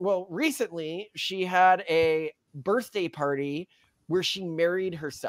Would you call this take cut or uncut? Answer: uncut